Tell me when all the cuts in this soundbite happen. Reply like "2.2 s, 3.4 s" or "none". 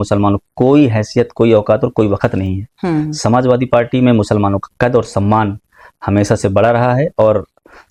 none